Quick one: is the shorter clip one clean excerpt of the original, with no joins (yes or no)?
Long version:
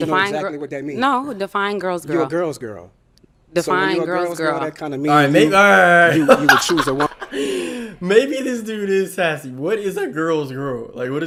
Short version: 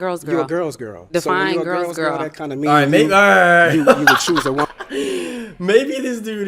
no